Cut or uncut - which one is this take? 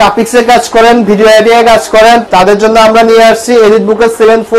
cut